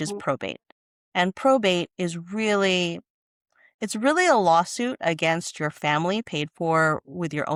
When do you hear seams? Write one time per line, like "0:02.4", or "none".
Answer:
none